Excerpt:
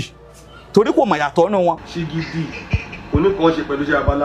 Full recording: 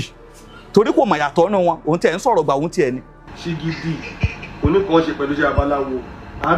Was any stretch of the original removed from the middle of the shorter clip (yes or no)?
yes